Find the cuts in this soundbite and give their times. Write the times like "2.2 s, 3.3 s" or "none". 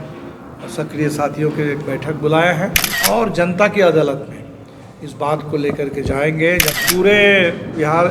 2.9 s, 6.7 s